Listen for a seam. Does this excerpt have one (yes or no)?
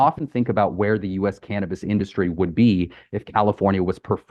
no